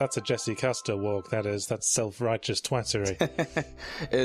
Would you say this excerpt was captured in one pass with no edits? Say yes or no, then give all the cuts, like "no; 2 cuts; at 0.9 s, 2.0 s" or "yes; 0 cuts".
yes; 0 cuts